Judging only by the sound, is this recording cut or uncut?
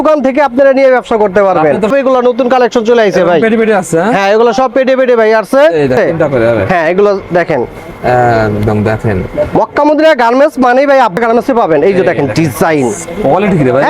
cut